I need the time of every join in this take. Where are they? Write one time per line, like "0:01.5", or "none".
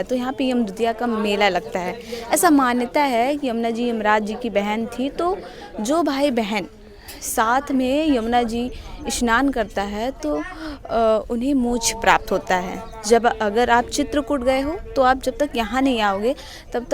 none

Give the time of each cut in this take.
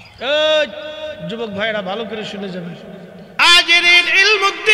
0:03.4

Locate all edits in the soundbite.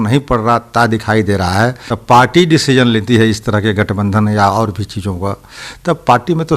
0:01.9

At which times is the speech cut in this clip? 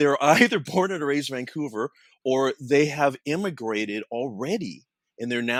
none

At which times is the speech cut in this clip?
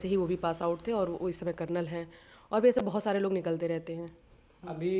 none

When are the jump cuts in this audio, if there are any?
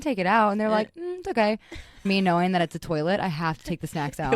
0:02.1

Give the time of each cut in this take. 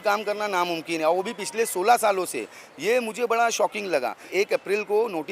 0:04.2

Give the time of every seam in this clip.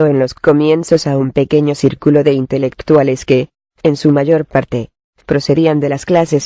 0:01.6

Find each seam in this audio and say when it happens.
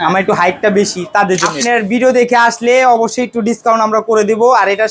0:01.5

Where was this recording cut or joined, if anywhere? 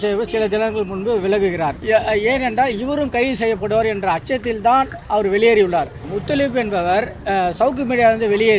0:01.8
0:06.1
0:07.2

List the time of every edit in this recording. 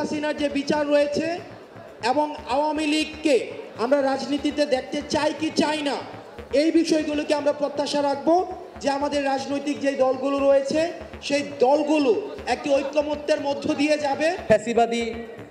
0:03.6
0:14.4

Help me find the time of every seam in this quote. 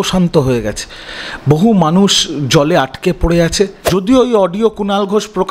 0:03.8

